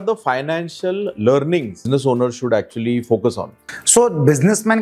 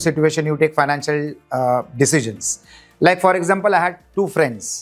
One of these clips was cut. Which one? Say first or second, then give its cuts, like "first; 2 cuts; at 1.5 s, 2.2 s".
first; 1 cut; at 1.9 s